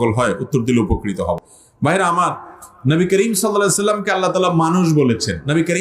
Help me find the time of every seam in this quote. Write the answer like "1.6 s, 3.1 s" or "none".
none